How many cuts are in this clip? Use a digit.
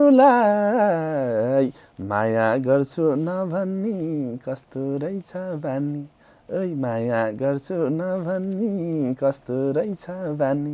0